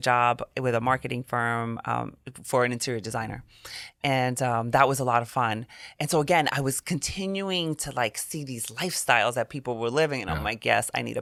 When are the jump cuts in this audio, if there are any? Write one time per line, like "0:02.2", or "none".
none